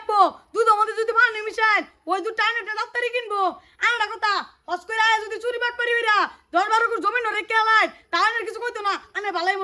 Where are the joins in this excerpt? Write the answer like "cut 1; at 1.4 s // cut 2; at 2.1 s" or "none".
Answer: none